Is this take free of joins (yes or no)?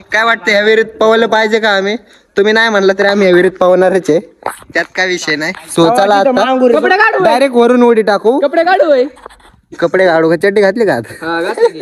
yes